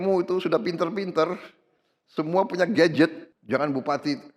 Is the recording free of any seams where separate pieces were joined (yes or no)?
no